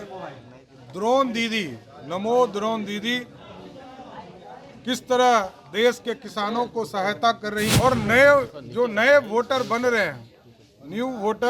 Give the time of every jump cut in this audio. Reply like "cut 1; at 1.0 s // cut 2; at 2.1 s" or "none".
cut 1; at 7.7 s